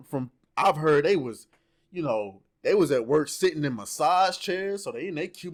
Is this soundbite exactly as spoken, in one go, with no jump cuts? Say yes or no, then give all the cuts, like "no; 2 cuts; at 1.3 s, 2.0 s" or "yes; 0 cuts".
yes; 0 cuts